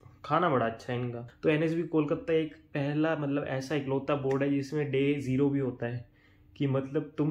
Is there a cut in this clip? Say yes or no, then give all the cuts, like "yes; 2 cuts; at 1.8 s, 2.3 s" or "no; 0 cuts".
yes; 1 cut; at 1.2 s